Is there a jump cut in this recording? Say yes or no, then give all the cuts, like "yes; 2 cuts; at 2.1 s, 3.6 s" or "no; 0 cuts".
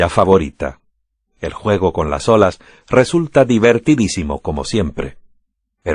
no; 0 cuts